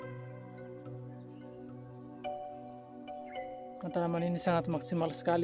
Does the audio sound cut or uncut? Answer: cut